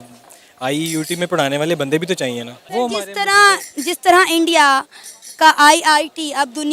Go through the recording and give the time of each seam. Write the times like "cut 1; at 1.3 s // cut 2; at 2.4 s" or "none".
none